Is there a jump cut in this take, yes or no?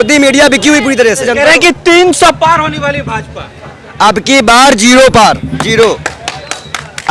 yes